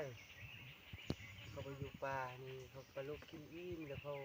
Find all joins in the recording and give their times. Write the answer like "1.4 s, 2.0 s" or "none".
none